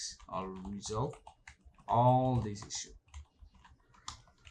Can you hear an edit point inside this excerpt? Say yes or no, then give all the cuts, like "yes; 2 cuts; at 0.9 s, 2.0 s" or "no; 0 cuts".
no; 0 cuts